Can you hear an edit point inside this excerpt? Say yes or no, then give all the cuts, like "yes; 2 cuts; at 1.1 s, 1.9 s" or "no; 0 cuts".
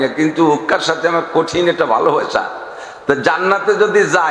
no; 0 cuts